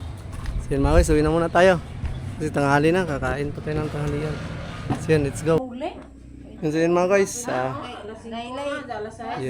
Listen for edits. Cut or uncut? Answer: cut